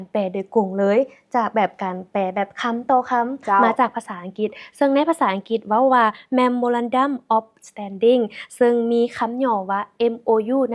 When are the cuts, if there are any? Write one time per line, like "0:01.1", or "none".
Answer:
none

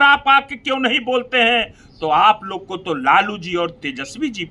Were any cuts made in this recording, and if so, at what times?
none

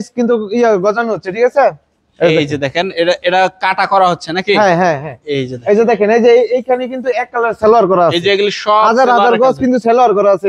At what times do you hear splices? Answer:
none

